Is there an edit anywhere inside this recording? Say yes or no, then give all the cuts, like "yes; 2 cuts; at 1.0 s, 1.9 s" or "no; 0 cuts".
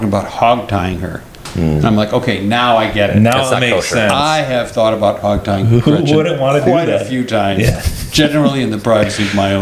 no; 0 cuts